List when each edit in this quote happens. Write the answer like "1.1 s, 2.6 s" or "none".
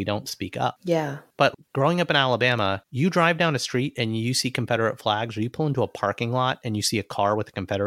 0.9 s, 2.9 s